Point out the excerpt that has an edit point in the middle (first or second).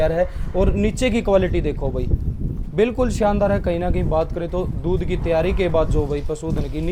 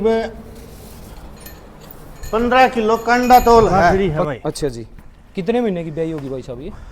second